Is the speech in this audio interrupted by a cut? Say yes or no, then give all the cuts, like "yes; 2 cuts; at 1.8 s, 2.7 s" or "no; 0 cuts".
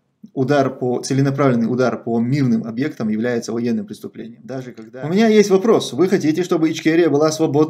yes; 1 cut; at 4.3 s